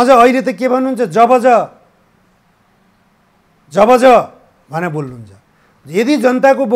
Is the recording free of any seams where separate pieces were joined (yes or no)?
yes